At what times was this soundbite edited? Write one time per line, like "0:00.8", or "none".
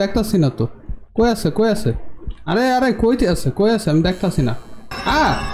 none